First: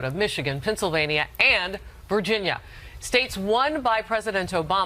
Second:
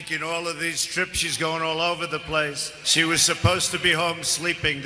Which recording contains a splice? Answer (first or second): first